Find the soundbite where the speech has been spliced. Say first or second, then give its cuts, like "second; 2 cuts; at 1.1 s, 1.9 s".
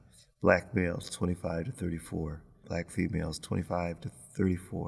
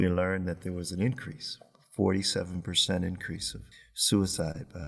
first; 1 cut; at 2.6 s